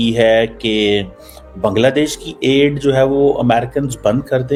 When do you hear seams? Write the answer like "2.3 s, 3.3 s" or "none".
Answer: none